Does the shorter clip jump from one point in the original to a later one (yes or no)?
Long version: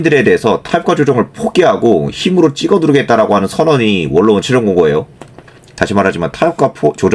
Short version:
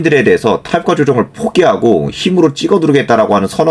no